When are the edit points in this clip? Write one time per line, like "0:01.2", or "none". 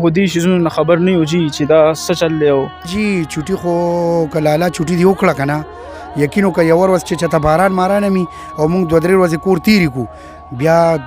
0:02.8